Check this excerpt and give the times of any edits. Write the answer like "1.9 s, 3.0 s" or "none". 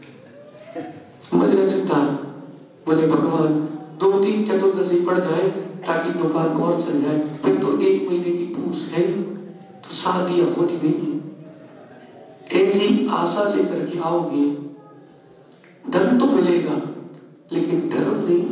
10.5 s

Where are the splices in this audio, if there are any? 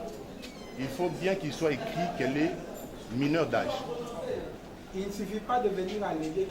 4.6 s

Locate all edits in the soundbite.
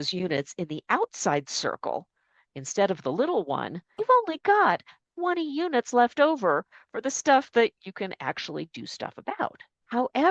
none

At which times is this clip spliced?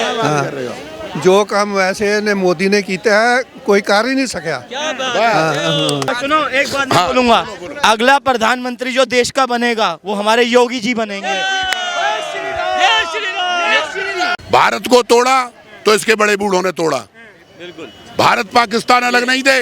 6.1 s, 14.4 s

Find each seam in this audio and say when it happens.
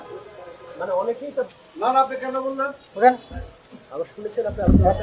2.8 s

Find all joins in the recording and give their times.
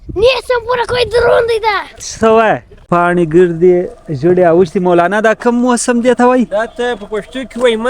2.9 s

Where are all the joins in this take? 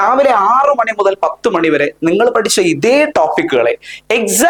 none

